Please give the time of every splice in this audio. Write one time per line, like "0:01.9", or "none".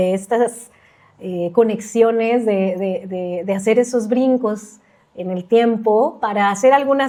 none